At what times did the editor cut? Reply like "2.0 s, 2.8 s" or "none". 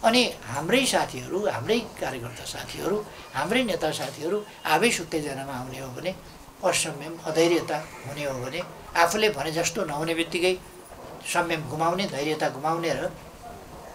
none